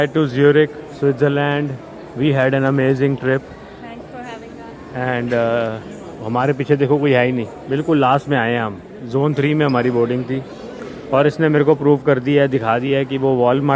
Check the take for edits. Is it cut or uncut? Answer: uncut